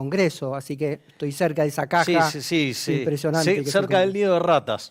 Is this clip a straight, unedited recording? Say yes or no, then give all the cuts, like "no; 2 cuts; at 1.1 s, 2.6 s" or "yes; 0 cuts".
yes; 0 cuts